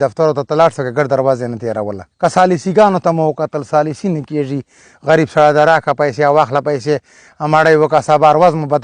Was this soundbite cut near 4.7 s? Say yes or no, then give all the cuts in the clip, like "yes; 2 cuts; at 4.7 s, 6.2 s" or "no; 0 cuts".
no; 1 cut; at 2.0 s